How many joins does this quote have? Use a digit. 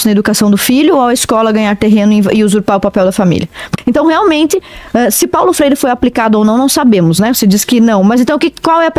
1